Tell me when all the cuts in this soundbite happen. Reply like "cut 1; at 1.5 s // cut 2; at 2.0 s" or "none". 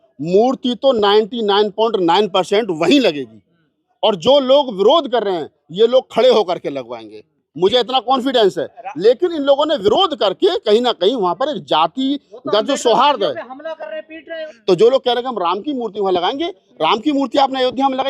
cut 1; at 14.3 s